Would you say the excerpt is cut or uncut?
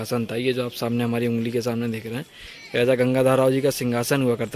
uncut